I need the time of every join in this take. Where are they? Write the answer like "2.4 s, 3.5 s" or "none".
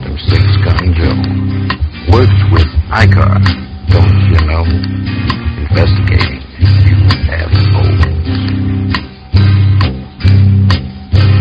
none